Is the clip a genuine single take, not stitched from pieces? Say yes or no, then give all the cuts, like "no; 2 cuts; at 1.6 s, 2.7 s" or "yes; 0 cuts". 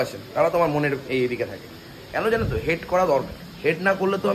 yes; 0 cuts